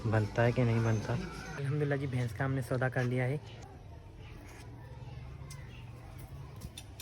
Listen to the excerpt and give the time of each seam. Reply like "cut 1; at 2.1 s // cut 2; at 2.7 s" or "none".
cut 1; at 1.5 s // cut 2; at 3.6 s